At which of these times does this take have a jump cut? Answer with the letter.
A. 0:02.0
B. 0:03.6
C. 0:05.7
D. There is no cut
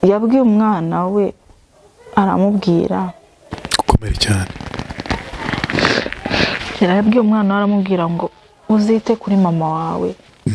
B